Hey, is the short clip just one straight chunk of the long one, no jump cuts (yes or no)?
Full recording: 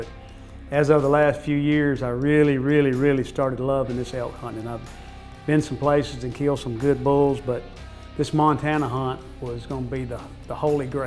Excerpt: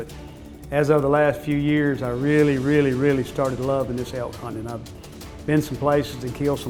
yes